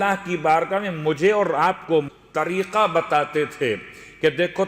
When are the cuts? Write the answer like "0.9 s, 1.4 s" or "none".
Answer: 2.2 s